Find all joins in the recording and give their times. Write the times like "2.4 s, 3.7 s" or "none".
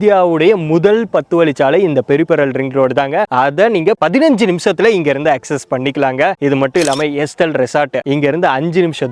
none